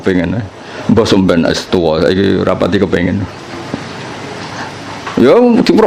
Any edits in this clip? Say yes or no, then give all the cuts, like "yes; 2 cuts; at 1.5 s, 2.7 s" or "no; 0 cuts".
no; 0 cuts